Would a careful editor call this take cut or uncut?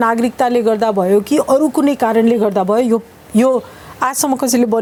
uncut